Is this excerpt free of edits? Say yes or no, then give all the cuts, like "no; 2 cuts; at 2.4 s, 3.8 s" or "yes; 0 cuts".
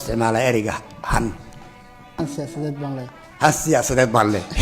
no; 1 cut; at 2.2 s